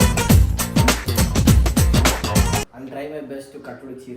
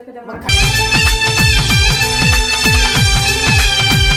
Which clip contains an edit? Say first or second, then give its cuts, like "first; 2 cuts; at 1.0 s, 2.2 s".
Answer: first; 1 cut; at 2.8 s